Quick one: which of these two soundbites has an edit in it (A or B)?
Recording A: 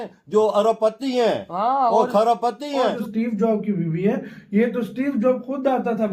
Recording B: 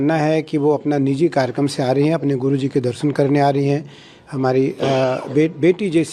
A